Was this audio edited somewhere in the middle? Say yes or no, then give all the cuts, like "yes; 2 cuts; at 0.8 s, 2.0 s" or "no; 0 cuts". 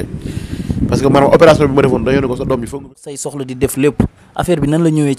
yes; 1 cut; at 2.9 s